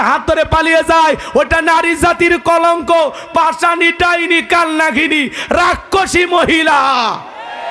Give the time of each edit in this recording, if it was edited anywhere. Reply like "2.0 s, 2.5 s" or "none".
none

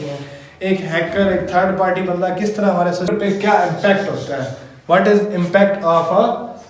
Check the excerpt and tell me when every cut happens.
3.1 s

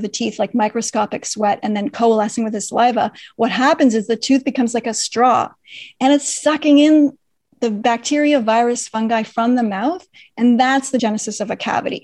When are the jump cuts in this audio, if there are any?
11.0 s

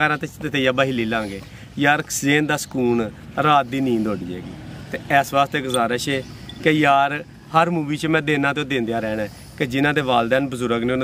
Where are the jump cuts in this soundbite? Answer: none

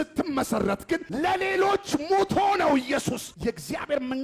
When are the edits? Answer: 1.1 s, 3.2 s

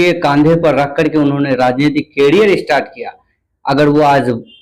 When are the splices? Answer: none

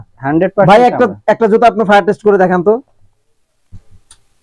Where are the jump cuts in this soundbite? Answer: none

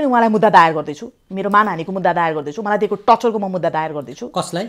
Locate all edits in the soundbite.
none

